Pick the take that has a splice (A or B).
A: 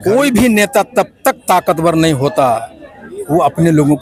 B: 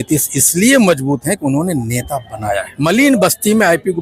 B